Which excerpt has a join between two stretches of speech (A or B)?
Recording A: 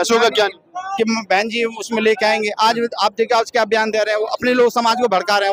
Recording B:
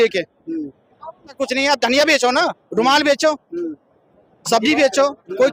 B